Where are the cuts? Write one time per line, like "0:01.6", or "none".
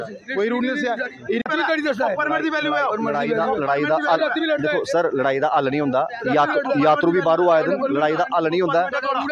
0:01.5